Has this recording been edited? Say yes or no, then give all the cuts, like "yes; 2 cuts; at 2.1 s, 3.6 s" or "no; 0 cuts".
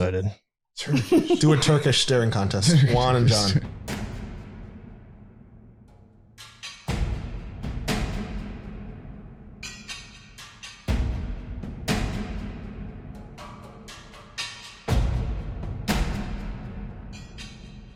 no; 0 cuts